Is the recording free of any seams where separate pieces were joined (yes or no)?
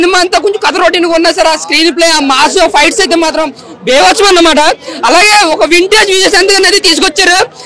yes